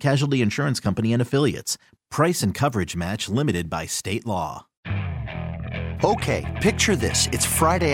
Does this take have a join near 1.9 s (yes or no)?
no